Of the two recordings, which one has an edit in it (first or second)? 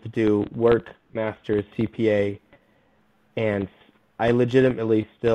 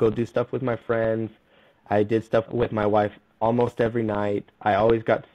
second